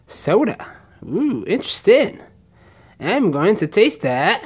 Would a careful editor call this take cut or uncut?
uncut